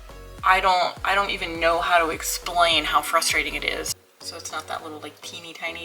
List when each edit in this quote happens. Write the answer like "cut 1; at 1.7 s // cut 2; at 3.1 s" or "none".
cut 1; at 4.0 s